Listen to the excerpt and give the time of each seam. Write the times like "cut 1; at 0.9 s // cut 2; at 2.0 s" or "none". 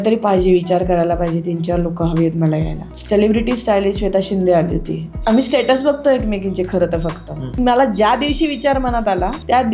cut 1; at 5.1 s // cut 2; at 7.6 s